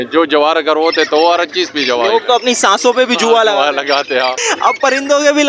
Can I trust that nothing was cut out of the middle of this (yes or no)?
no